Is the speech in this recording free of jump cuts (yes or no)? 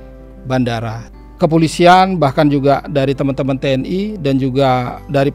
no